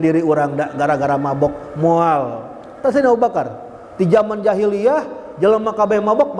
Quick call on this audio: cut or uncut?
uncut